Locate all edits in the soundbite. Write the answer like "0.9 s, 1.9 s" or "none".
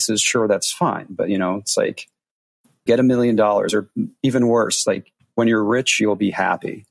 2.8 s